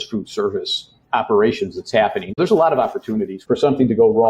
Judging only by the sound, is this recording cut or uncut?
cut